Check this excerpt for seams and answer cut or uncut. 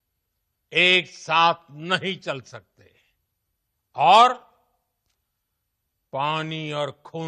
uncut